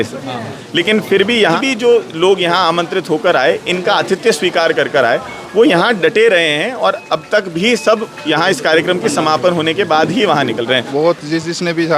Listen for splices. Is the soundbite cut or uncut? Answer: cut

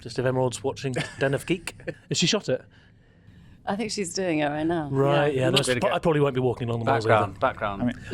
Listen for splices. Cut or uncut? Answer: cut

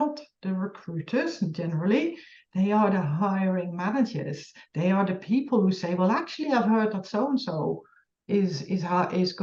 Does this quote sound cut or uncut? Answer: uncut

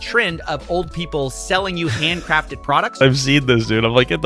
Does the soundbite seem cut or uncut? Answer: cut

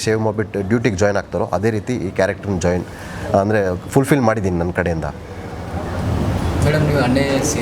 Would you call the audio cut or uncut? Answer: uncut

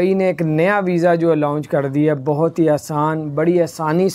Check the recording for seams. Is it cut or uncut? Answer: uncut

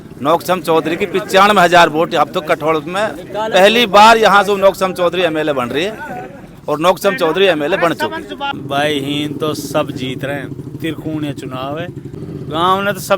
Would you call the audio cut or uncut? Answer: cut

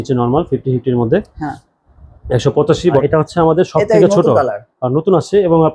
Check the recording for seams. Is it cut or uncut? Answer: cut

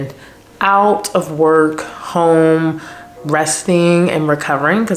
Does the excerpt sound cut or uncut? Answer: uncut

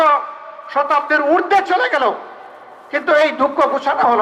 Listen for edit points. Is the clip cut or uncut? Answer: uncut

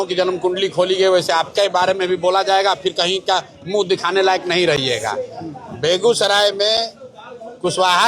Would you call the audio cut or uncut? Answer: uncut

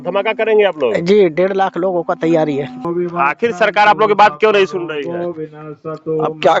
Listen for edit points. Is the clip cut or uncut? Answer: cut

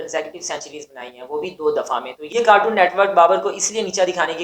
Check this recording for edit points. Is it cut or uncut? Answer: cut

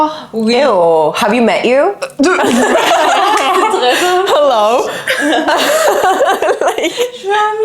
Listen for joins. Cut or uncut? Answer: uncut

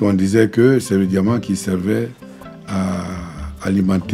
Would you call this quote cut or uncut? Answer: uncut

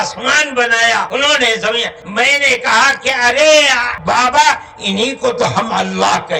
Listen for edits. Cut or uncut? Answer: cut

